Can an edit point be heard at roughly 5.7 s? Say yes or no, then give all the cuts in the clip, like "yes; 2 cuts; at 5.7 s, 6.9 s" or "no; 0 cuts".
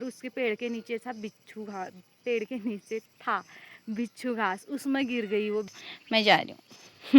yes; 1 cut; at 5.7 s